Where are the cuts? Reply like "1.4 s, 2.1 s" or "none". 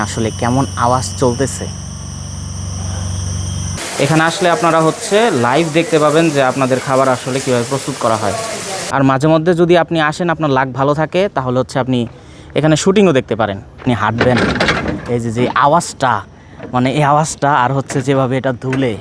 3.8 s, 8.5 s, 13.8 s